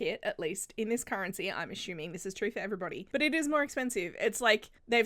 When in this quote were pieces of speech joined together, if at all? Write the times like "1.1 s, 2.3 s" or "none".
3.0 s